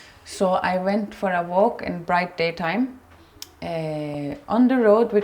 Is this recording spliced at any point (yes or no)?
no